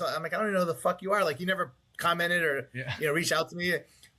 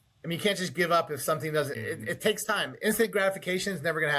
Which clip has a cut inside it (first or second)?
second